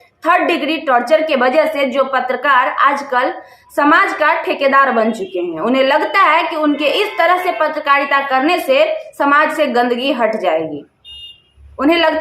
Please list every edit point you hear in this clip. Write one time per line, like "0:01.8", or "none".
none